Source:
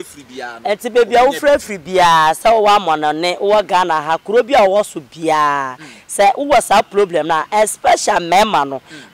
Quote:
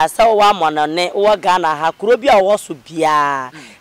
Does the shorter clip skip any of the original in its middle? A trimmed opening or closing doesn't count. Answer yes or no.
no